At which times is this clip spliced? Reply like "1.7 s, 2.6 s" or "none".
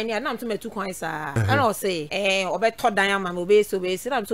1.3 s, 2.1 s

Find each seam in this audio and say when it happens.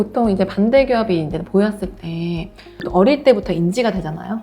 none

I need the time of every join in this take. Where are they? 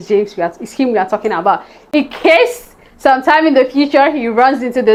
none

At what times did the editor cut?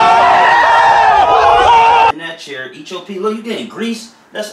2.2 s

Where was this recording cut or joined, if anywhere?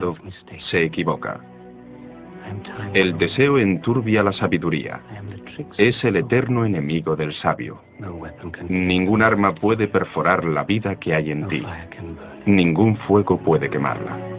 7.9 s

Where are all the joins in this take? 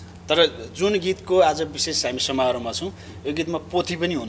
none

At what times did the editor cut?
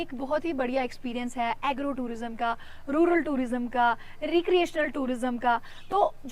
none

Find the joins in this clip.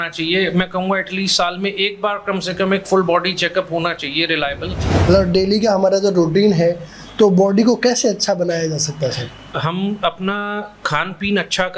4.9 s

